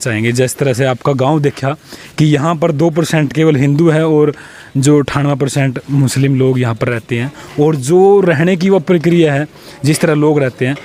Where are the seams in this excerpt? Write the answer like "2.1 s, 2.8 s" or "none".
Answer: none